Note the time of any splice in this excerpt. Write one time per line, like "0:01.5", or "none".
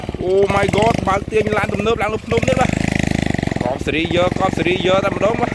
none